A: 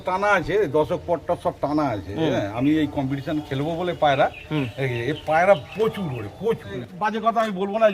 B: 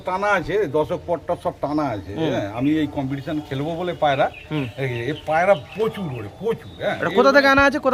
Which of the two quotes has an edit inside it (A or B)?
A